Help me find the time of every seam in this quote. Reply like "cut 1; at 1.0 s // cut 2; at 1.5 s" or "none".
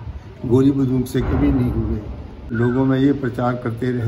cut 1; at 2.5 s